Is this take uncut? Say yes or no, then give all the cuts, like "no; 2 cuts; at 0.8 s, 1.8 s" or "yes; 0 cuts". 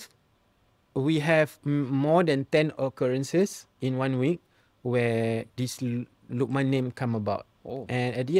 yes; 0 cuts